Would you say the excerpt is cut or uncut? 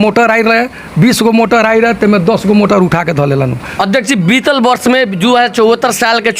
cut